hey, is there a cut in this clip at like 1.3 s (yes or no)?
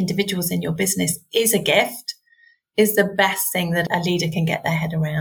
no